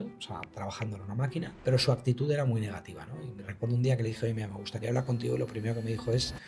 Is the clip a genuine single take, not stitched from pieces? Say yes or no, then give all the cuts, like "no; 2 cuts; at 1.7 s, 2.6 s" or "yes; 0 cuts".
no; 1 cut; at 1.5 s